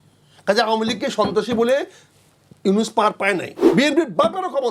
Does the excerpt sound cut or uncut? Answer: cut